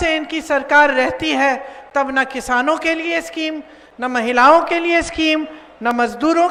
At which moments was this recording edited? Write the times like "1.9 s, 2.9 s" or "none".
none